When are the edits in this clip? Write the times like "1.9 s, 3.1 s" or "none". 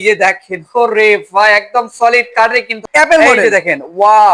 2.8 s